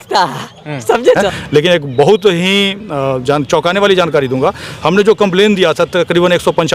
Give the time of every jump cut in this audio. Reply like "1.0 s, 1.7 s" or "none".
1.2 s